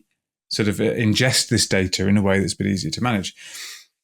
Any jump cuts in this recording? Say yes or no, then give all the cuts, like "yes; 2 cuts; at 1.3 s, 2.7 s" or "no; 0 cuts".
no; 0 cuts